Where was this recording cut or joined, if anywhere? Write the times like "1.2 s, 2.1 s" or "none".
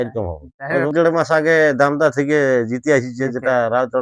0.9 s